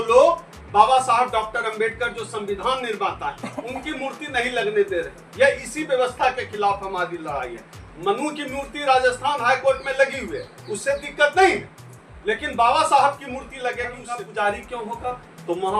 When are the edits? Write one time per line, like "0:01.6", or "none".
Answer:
0:14.0